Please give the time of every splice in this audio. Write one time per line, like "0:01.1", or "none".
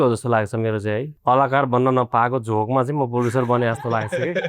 0:01.1